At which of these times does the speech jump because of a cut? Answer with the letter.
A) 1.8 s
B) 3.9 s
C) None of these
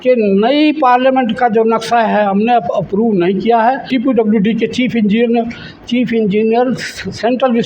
B